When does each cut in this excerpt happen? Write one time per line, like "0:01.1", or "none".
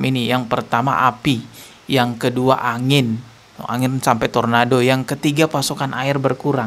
none